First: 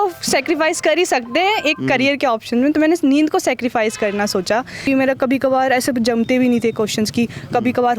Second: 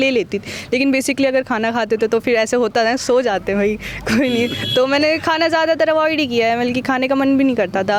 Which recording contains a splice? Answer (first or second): first